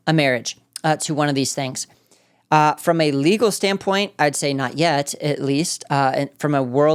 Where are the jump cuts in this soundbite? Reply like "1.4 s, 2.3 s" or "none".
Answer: none